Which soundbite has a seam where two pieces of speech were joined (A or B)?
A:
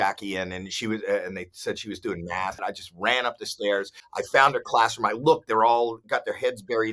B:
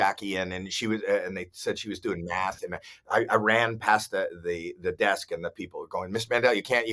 A